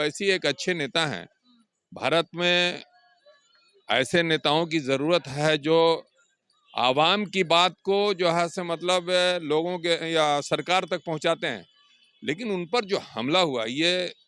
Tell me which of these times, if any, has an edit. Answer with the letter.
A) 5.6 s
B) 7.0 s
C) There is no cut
C